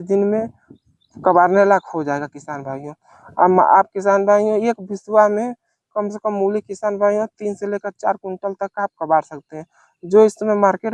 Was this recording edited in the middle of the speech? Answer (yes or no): no